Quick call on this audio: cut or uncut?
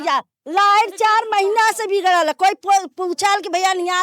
uncut